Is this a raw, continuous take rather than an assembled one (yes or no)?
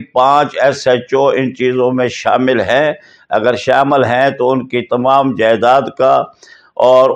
yes